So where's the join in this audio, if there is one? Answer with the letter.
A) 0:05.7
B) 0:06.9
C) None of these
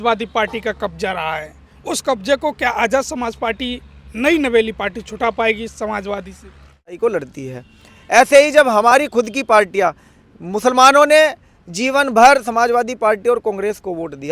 B